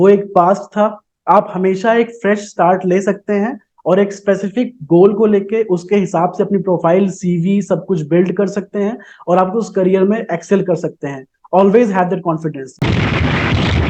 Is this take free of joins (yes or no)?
no